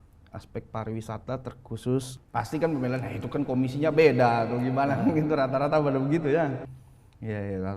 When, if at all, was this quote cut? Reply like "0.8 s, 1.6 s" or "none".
2.2 s